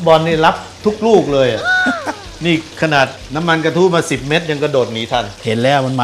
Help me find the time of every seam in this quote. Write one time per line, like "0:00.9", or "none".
none